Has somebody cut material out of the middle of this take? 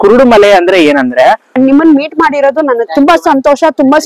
yes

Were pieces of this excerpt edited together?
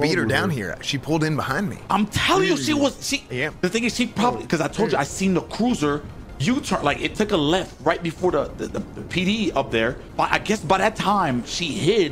no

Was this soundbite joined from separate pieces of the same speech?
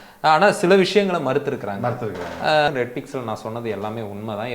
yes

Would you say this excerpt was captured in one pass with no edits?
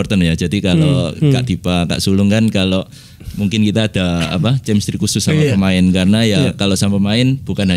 yes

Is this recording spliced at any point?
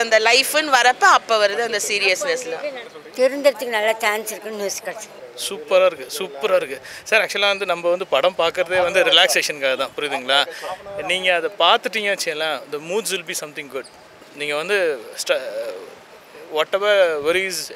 yes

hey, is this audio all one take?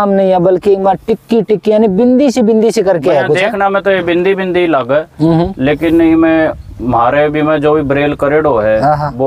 yes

